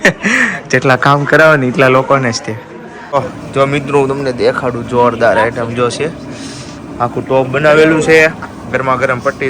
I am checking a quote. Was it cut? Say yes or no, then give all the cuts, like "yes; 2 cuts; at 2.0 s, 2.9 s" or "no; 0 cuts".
yes; 1 cut; at 3.1 s